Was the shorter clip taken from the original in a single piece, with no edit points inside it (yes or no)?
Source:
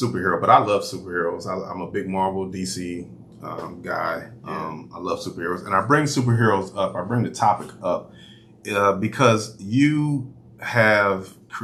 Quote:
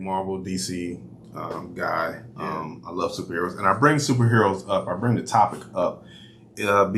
yes